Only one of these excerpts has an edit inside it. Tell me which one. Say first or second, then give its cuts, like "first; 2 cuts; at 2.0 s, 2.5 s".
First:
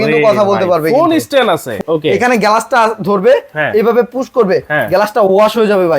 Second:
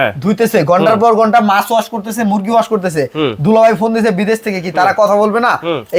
first; 1 cut; at 1.7 s